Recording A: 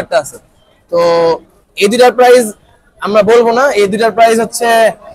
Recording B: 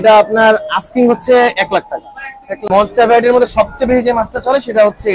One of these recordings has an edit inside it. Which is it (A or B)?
B